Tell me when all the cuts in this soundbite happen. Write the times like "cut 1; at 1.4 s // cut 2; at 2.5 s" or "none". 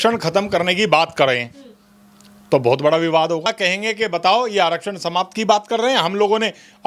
cut 1; at 3.5 s

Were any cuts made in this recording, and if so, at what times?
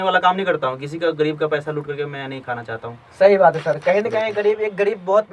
none

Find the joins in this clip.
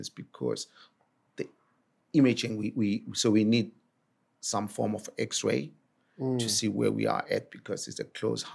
cut 1; at 1.1 s

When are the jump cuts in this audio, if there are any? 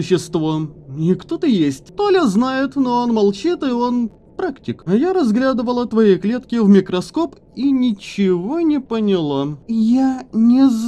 cut 1; at 1.9 s // cut 2; at 4.7 s // cut 3; at 9.6 s

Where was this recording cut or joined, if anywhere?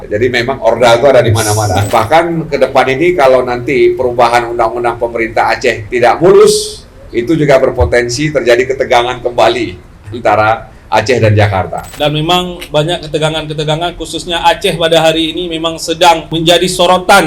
cut 1; at 1.8 s // cut 2; at 11.9 s

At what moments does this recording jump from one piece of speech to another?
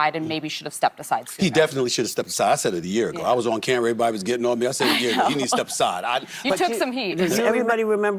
cut 1; at 7.3 s

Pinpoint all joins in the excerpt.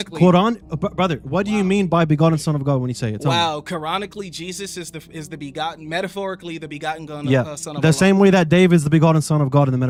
none

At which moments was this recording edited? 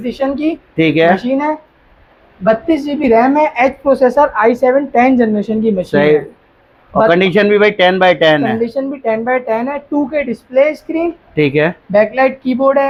none

